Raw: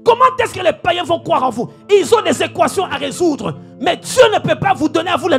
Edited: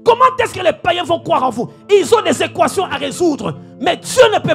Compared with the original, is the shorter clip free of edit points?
yes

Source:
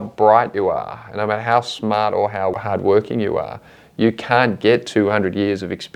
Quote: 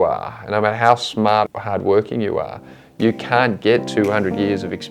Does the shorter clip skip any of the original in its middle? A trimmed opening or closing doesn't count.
yes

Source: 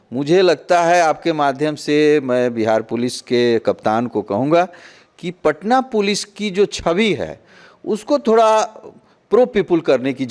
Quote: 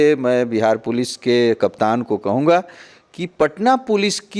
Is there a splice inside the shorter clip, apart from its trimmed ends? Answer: no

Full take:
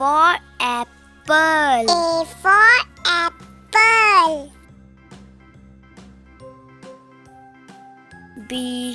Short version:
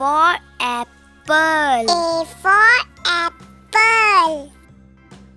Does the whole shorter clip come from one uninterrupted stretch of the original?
yes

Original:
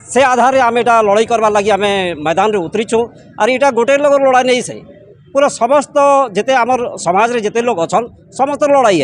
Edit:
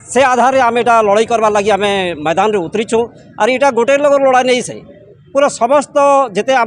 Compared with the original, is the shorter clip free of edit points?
yes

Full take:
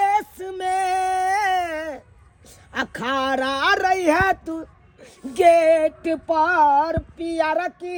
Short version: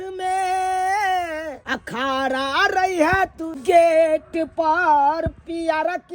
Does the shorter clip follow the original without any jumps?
no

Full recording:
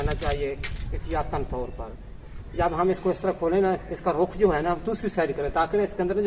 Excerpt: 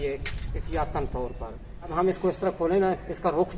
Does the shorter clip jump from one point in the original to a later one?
yes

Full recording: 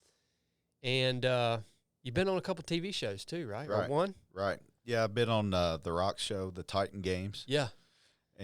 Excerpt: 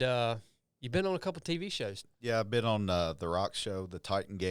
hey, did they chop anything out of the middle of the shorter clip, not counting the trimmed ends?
yes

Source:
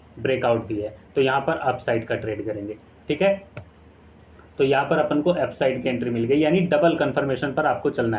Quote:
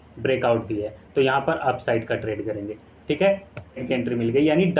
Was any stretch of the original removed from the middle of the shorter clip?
yes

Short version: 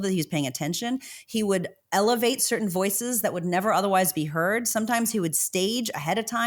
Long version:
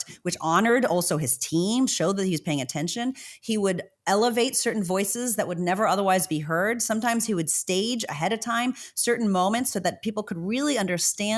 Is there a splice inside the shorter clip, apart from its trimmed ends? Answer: no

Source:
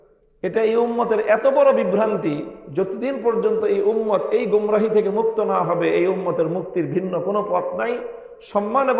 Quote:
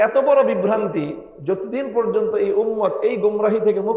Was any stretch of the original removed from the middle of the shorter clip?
no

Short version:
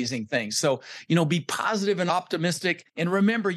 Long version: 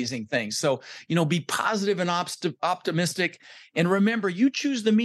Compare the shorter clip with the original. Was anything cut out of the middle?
yes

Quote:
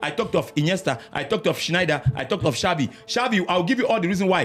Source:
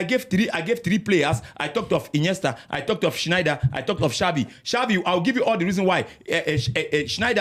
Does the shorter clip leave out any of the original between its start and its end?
no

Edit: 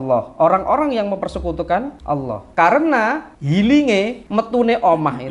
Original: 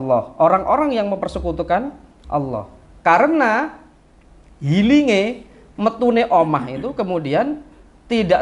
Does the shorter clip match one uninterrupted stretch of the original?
no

